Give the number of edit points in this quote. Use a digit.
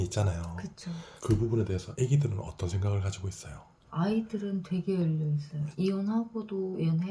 1